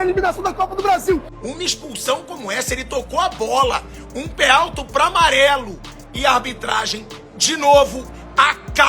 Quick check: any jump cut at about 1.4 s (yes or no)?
yes